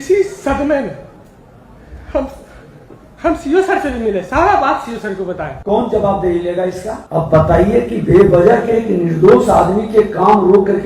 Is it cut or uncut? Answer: cut